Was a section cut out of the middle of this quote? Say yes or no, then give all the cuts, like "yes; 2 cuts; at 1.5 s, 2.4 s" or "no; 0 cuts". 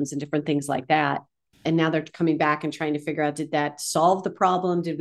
no; 0 cuts